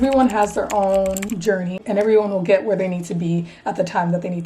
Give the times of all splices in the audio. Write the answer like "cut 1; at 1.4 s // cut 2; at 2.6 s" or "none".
cut 1; at 1.7 s